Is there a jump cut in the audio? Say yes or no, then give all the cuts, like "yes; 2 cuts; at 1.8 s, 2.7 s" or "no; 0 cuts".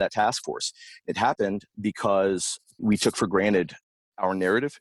yes; 1 cut; at 2.8 s